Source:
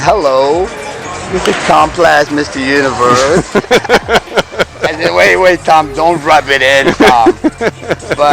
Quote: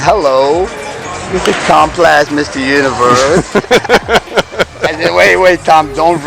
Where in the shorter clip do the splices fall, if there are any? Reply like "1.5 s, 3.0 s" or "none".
none